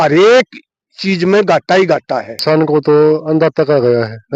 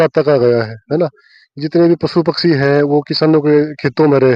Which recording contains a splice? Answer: first; 1 cut; at 2.4 s

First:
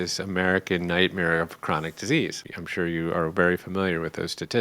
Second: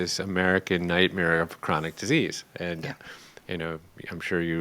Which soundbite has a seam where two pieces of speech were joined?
first; 1 cut; at 2.4 s

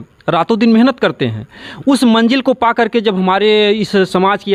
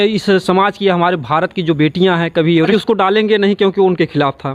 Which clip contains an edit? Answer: second; 1 cut; at 2.7 s

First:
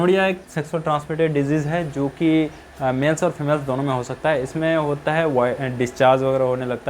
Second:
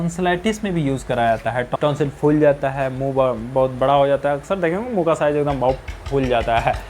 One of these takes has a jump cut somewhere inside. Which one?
second; 1 cut; at 1.7 s

